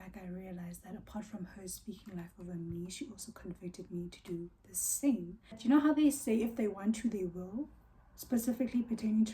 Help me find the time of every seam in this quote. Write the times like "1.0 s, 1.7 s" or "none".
5.5 s